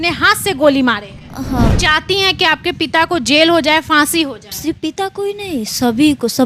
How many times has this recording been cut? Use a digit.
1